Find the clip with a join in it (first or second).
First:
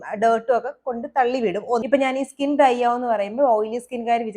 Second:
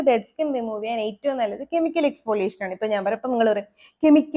first